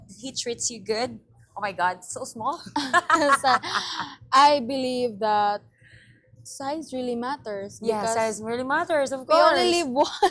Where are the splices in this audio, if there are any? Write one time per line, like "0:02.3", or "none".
none